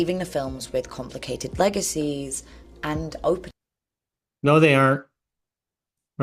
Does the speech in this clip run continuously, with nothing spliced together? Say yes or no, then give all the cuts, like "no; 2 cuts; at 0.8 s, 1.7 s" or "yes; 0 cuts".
yes; 0 cuts